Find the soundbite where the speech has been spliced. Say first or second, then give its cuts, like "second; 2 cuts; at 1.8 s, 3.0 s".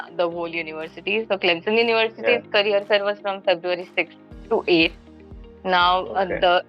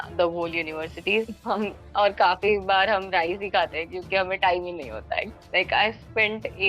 second; 2 cuts; at 1.3 s, 5.3 s